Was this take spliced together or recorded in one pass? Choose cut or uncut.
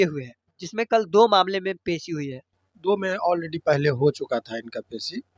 uncut